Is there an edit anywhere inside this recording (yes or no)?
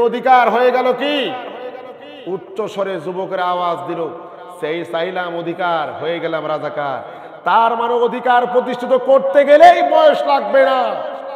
no